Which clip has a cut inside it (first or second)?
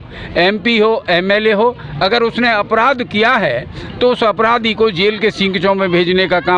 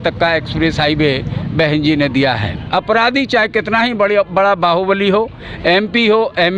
second